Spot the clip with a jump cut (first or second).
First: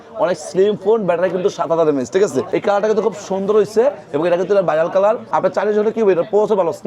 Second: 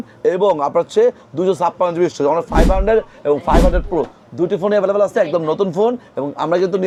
first